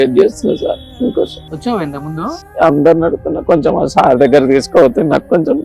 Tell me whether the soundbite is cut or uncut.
cut